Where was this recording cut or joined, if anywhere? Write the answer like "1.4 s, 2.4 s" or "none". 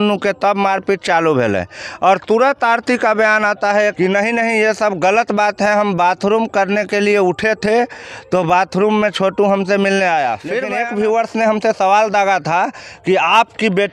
3.9 s, 10.6 s